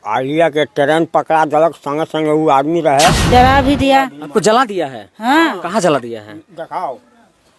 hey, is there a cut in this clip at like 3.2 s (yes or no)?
yes